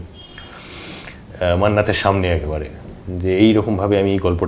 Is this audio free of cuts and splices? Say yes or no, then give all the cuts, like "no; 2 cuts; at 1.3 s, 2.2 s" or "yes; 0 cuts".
yes; 0 cuts